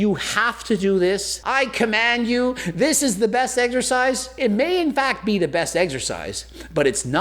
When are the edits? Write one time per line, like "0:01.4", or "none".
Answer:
0:01.4
0:04.3

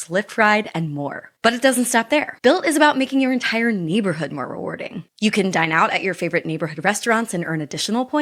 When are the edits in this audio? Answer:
none

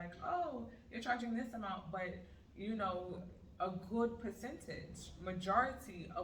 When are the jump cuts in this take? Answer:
none

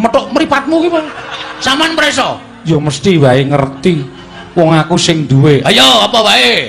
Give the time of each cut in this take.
0:01.4

